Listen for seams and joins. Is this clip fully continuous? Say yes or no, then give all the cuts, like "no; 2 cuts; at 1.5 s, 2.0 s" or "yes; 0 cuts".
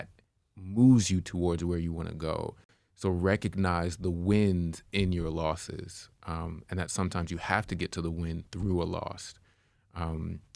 yes; 0 cuts